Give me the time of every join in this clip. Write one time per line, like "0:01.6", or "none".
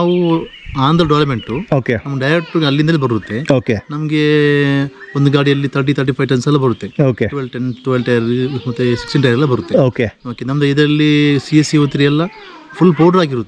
none